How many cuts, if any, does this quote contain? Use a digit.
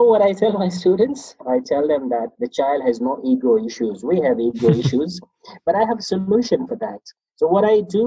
2